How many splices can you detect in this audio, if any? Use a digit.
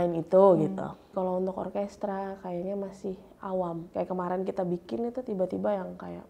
2